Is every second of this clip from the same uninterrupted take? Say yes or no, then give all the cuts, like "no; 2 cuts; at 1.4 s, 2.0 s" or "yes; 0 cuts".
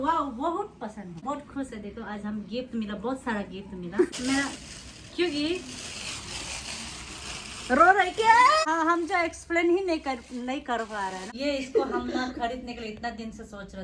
no; 4 cuts; at 1.2 s, 4.1 s, 8.6 s, 11.3 s